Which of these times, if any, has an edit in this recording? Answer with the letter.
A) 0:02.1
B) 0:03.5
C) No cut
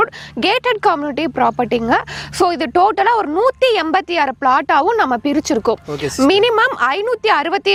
C